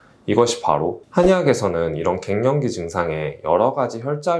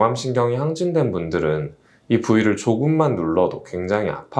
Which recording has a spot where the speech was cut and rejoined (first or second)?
first